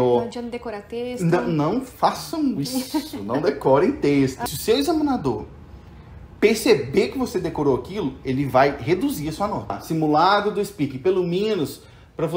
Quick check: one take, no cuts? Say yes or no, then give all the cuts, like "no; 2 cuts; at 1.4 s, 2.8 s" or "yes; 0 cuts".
no; 2 cuts; at 4.5 s, 9.8 s